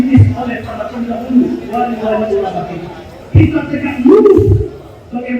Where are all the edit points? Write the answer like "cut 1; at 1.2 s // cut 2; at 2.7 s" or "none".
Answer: cut 1; at 3.1 s